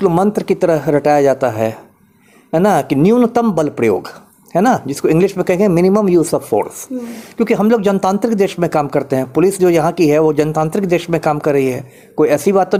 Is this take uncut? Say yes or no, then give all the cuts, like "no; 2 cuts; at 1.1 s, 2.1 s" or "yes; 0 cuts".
yes; 0 cuts